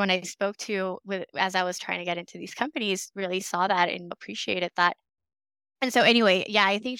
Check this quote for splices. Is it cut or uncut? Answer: uncut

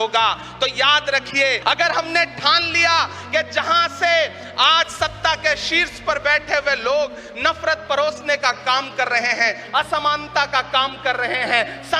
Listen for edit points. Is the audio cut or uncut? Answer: cut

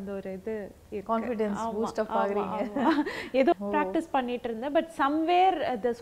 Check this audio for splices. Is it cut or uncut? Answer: cut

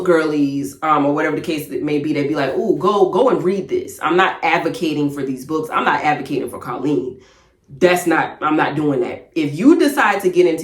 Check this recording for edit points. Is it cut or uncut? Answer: uncut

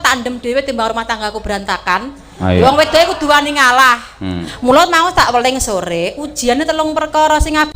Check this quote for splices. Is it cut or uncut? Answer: cut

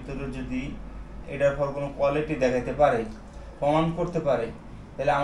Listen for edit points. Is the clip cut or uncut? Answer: uncut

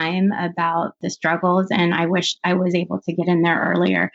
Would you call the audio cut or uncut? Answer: cut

